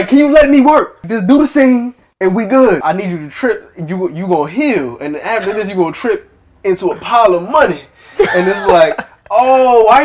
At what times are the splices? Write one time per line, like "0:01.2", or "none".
0:01.0
0:02.8